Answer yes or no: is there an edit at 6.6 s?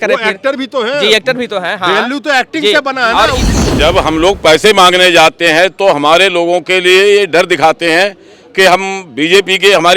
no